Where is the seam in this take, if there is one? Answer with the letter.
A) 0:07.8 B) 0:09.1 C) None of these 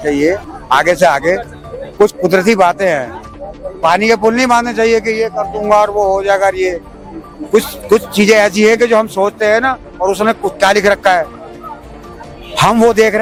C